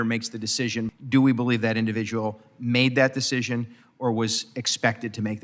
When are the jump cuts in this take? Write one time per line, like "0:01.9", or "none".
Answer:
0:00.9